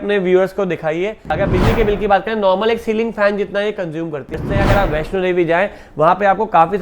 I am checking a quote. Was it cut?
yes; 2 cuts; at 1.4 s, 4.3 s

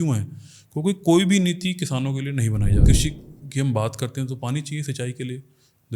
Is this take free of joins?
no; 1 cut; at 2.8 s

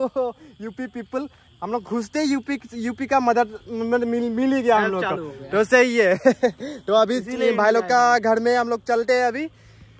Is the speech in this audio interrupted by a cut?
no; 0 cuts

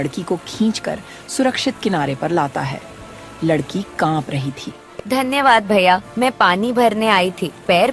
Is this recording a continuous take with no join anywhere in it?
yes; 0 cuts

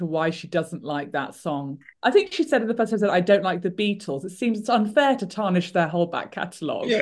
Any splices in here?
no; 0 cuts

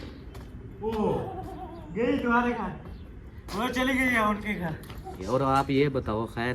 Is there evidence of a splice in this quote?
yes; 1 cut; at 5.2 s

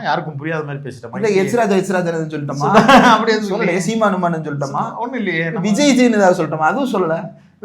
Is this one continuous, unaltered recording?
yes; 0 cuts

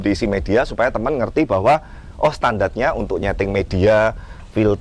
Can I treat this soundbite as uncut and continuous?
yes; 0 cuts

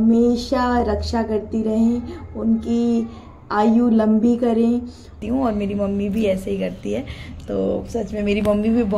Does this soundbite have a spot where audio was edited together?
yes; 1 cut; at 5.1 s

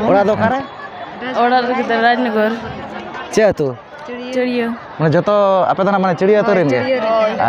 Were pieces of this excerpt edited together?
no; 0 cuts

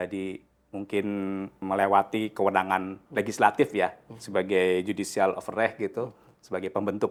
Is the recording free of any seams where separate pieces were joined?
yes; 0 cuts

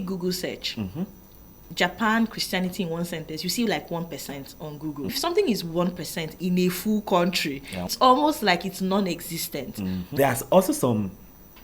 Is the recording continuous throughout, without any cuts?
no; 3 cuts; at 5.2 s, 7.9 s, 10.0 s

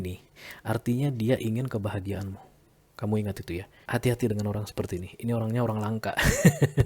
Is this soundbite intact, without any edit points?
no; 1 cut; at 3.7 s

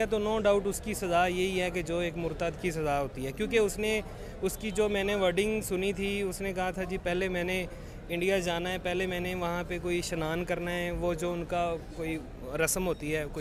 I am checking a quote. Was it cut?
no; 0 cuts

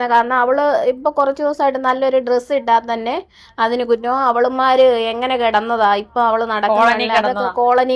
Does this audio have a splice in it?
no; 0 cuts

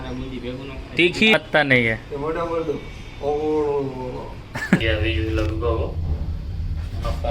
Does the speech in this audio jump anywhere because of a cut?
yes; 2 cuts; at 1.3 s, 4.8 s

